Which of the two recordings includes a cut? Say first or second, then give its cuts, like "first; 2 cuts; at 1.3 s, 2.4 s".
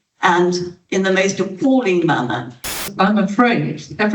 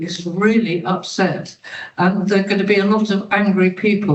first; 1 cut; at 2.7 s